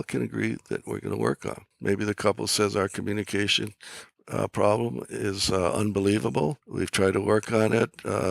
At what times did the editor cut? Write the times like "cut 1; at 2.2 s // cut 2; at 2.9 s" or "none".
cut 1; at 1.7 s // cut 2; at 6.6 s

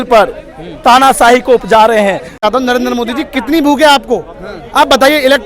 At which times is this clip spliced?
cut 1; at 2.4 s

